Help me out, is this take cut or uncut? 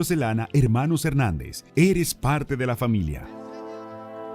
cut